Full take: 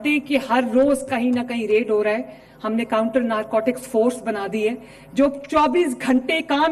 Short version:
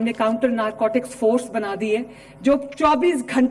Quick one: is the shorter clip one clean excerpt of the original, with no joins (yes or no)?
yes